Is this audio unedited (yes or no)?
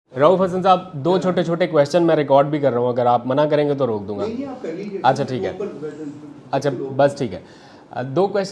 yes